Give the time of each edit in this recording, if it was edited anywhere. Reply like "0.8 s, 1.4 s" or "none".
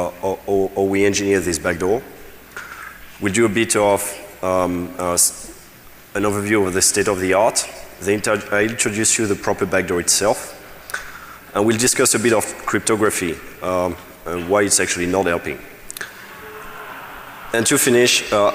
9.6 s